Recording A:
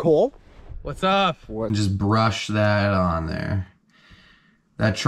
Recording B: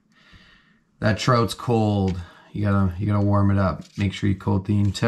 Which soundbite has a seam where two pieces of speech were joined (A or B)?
A